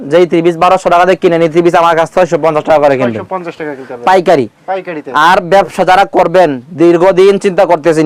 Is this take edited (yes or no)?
no